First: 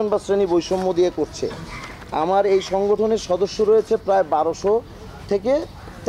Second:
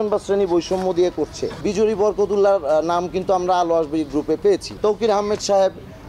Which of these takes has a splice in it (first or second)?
second